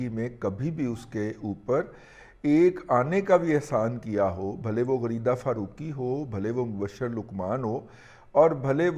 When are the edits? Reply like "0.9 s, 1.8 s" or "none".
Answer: none